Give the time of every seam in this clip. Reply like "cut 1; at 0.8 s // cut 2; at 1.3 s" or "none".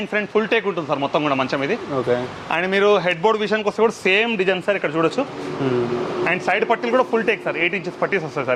none